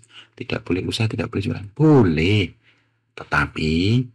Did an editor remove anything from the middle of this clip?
no; 0 cuts

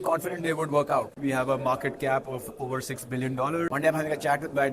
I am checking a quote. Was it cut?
yes; 2 cuts; at 1.1 s, 3.7 s

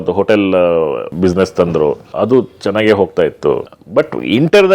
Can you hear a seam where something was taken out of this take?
yes; 3 cuts; at 1.1 s, 2.1 s, 3.7 s

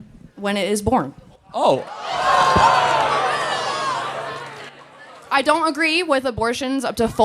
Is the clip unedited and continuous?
yes; 0 cuts

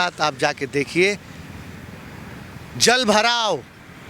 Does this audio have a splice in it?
no; 0 cuts

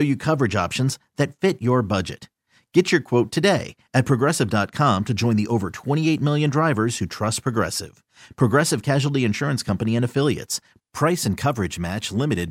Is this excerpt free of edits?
yes; 0 cuts

